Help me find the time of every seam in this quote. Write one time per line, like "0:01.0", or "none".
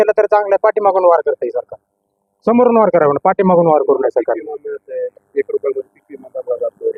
none